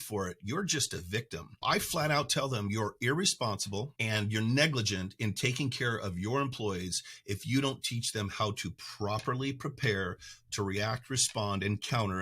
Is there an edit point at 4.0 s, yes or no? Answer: yes